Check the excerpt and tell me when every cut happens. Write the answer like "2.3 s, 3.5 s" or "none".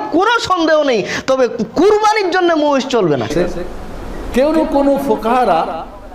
3.3 s